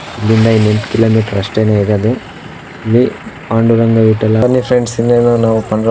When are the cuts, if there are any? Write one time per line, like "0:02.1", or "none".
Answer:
0:04.4